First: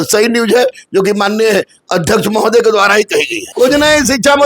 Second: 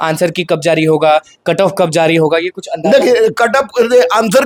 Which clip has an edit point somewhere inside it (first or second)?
first